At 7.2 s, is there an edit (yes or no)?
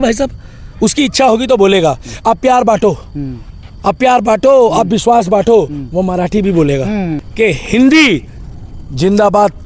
yes